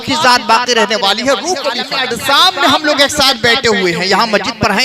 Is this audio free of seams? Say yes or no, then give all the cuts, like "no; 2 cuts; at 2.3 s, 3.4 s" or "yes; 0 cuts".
no; 1 cut; at 1.9 s